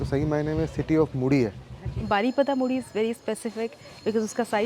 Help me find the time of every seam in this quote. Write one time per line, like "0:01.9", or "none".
0:01.9